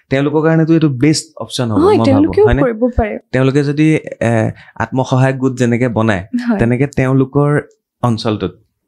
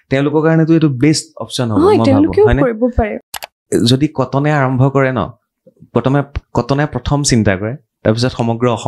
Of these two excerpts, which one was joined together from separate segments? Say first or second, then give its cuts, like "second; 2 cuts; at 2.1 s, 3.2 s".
second; 1 cut; at 3.2 s